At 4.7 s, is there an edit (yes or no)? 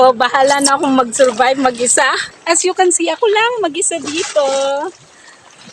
no